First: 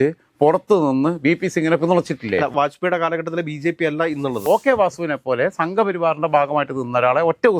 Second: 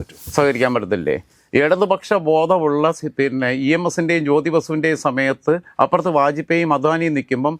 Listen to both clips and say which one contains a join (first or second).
first